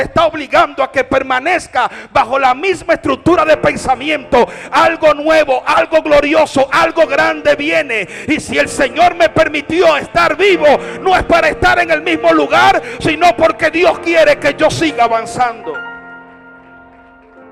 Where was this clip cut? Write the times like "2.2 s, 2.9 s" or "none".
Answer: none